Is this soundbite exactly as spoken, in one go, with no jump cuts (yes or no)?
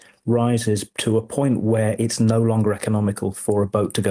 no